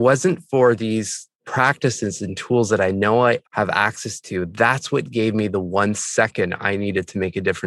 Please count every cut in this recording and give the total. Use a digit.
1